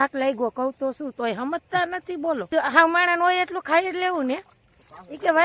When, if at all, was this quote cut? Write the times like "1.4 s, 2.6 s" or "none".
2.5 s